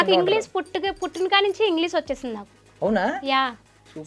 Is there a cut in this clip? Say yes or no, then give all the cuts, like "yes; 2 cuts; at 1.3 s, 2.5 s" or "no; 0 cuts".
no; 0 cuts